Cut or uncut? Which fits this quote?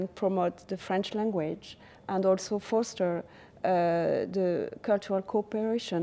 uncut